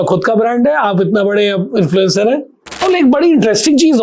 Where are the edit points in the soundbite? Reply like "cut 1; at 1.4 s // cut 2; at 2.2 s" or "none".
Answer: cut 1; at 2.7 s